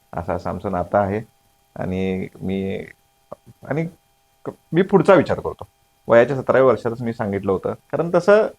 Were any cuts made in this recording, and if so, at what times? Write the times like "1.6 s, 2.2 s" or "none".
none